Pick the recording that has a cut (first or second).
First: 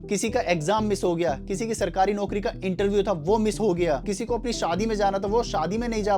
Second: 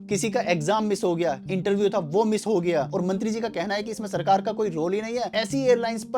second